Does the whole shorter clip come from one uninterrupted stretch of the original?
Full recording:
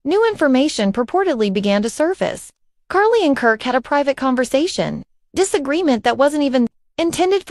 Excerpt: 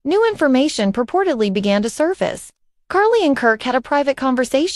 yes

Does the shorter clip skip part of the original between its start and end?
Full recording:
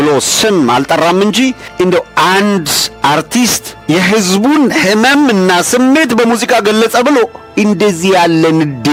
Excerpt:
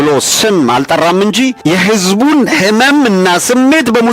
yes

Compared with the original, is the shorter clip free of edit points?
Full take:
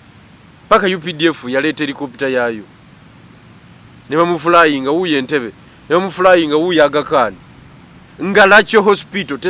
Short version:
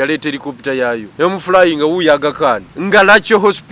no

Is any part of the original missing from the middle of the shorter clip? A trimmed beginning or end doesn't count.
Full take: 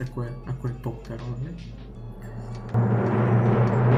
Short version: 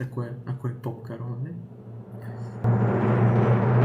yes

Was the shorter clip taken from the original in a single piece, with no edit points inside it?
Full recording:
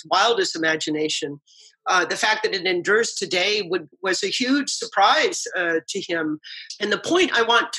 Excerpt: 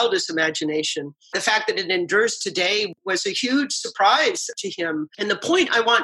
no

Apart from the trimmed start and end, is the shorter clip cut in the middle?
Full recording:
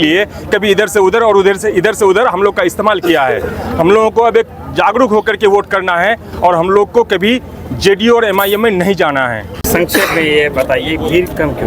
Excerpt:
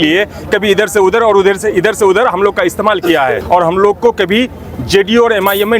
yes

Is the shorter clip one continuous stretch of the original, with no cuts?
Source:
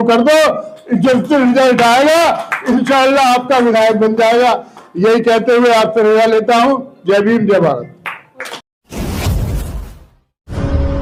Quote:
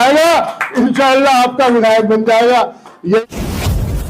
no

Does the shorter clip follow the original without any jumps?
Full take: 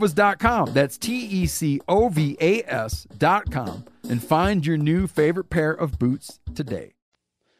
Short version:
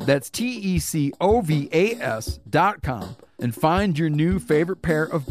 yes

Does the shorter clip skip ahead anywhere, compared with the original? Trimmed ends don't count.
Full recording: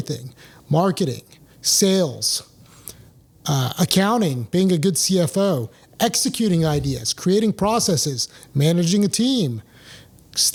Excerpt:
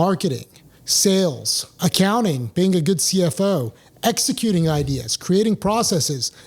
yes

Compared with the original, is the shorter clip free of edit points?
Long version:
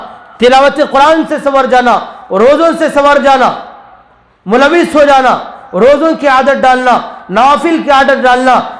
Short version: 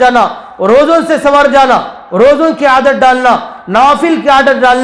no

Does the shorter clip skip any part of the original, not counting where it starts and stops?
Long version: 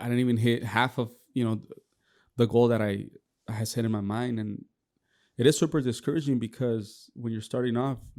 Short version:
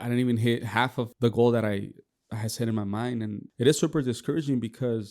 yes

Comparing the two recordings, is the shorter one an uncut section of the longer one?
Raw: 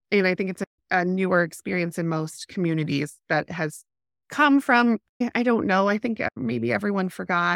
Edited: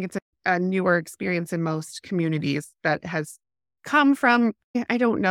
yes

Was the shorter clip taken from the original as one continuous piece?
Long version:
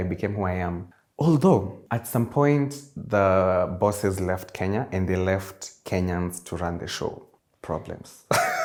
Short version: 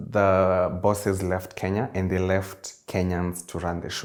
yes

